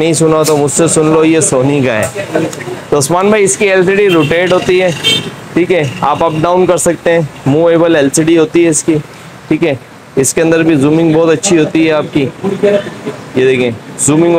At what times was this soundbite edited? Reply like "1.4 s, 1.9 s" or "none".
none

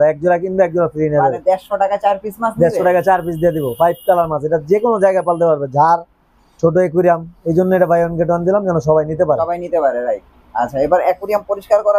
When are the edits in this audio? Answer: none

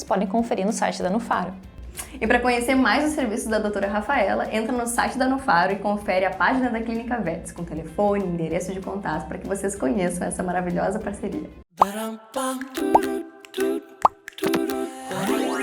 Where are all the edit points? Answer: 11.6 s

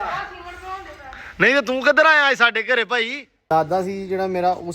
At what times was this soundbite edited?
3.5 s

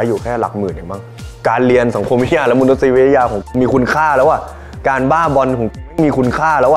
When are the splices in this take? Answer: 1.2 s

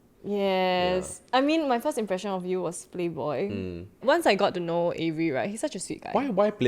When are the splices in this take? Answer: none

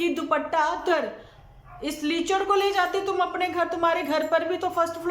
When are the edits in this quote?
0.9 s

